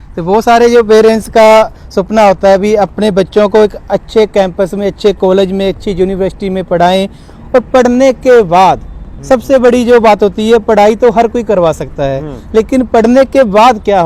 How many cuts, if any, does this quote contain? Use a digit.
1